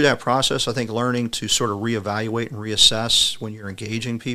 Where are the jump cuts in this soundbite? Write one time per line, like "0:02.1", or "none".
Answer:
none